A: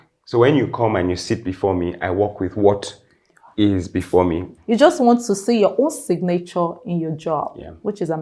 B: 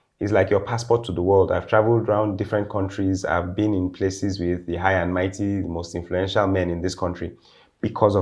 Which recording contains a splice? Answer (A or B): A